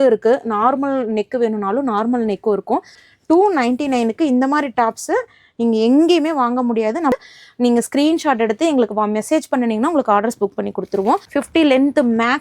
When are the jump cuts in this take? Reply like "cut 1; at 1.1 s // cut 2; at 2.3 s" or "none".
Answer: cut 1; at 3.0 s // cut 2; at 7.1 s // cut 3; at 11.2 s

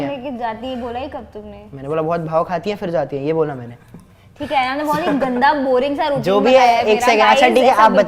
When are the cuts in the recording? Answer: none

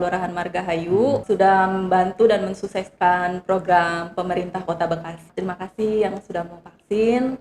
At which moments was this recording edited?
cut 1; at 1.2 s // cut 2; at 5.3 s

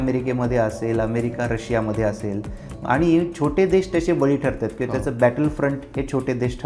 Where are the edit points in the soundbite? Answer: none

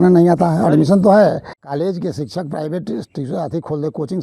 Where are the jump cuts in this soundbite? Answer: cut 1; at 1.5 s

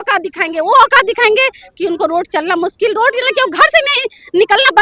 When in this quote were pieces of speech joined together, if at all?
none

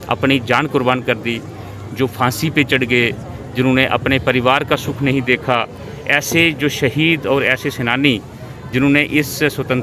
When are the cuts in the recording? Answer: none

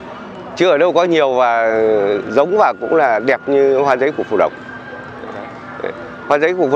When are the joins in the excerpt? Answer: none

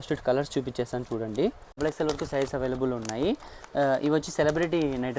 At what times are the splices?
cut 1; at 1.8 s

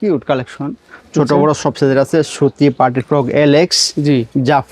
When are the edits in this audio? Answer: none

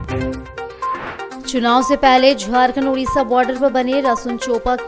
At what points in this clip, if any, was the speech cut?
none

